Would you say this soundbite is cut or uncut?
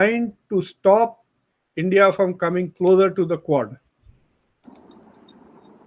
uncut